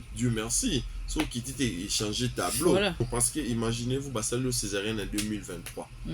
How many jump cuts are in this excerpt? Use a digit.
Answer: 1